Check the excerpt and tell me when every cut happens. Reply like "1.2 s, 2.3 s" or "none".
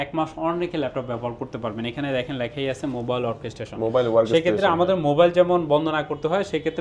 none